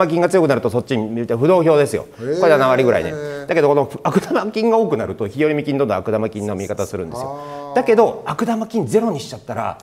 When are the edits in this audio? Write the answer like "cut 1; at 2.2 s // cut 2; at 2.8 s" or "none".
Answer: none